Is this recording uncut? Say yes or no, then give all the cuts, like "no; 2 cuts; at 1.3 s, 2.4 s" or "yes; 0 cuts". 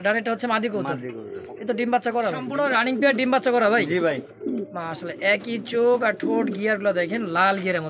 no; 1 cut; at 2.5 s